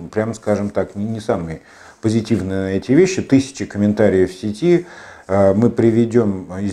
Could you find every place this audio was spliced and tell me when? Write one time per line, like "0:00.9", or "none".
none